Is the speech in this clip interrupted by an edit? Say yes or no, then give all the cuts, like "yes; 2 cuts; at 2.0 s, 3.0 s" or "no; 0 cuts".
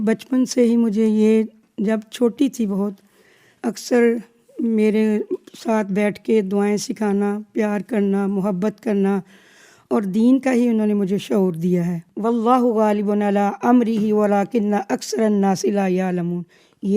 yes; 1 cut; at 12.0 s